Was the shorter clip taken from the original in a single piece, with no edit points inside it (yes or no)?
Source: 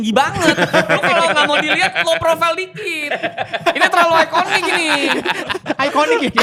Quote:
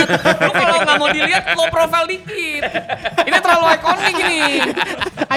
yes